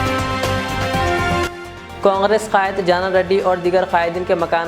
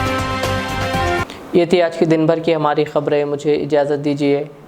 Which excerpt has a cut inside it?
first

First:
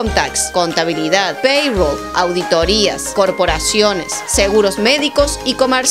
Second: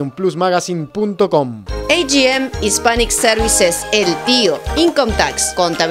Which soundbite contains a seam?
second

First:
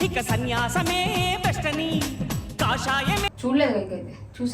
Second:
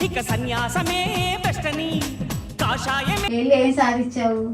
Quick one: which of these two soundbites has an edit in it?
first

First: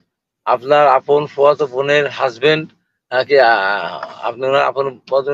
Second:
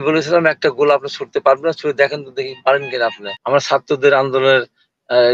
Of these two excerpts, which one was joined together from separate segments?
second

